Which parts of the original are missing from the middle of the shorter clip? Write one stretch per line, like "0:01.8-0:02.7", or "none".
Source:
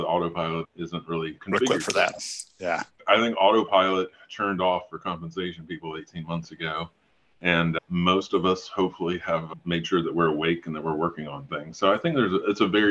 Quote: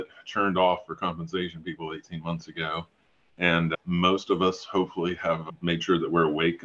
none